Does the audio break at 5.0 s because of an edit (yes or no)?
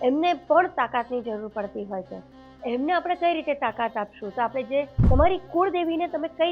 yes